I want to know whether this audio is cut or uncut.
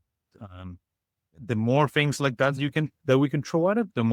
uncut